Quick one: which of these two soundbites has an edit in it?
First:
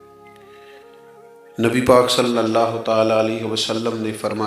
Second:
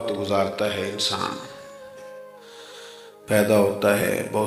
first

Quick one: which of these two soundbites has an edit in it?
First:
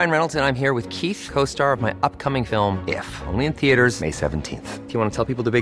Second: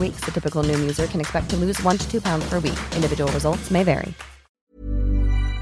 second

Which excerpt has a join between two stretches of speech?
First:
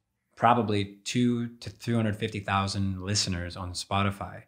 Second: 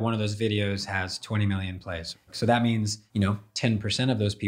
second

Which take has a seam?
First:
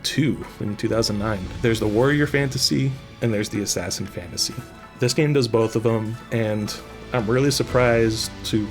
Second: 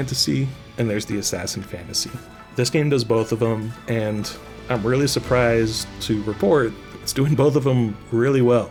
first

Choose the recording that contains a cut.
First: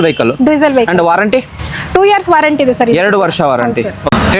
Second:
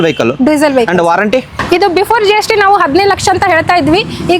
second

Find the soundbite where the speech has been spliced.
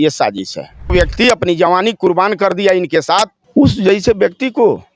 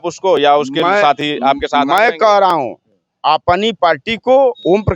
first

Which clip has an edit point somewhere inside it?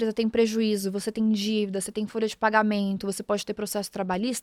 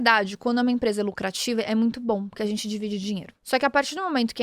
second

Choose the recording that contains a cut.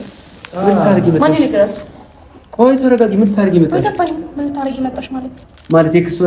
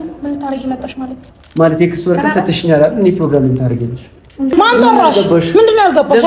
second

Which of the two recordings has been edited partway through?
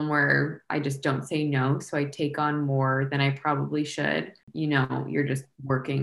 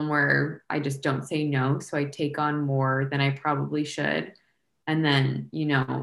first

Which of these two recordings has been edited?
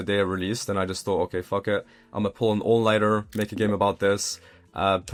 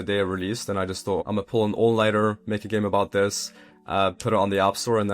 second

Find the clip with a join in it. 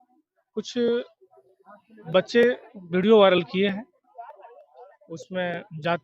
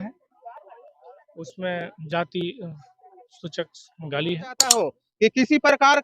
second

